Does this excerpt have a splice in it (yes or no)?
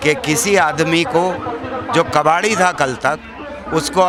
no